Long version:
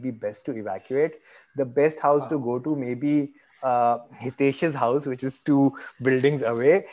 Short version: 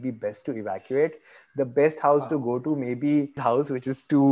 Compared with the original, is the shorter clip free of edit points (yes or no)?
no